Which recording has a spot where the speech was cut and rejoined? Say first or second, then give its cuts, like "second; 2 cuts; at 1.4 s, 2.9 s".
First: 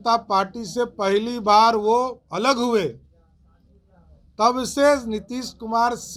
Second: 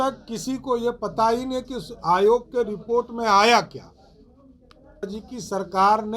second; 1 cut; at 5.0 s